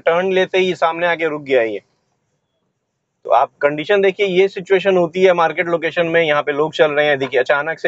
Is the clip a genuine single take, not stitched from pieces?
yes; 0 cuts

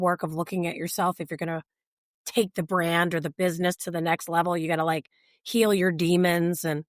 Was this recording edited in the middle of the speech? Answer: no; 0 cuts

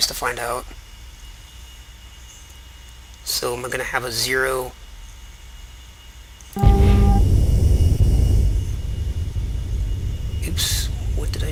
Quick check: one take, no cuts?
yes; 0 cuts

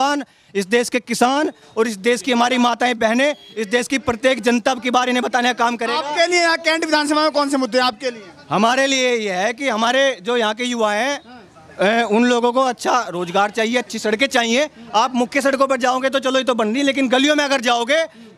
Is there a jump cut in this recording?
no; 0 cuts

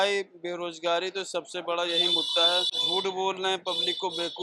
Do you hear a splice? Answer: yes; 1 cut; at 2.8 s

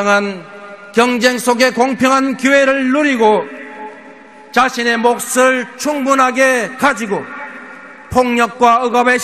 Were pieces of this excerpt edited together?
yes; 1 cut; at 4.3 s

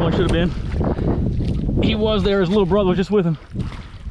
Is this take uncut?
yes; 0 cuts

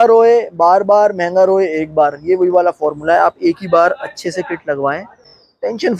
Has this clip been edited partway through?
no; 0 cuts

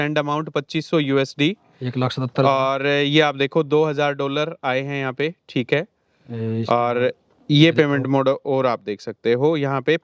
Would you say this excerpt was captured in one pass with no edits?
yes; 0 cuts

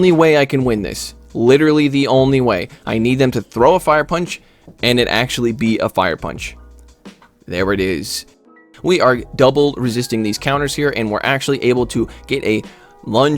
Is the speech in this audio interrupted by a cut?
yes; 1 cut; at 8.6 s

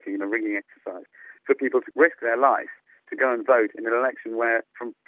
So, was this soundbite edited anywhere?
yes; 1 cut; at 1.9 s

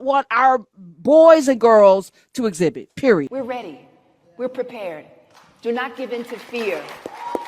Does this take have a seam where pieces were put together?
yes; 1 cut; at 3.2 s

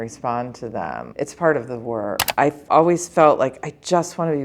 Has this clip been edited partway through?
yes; 2 cuts; at 1.0 s, 2.2 s

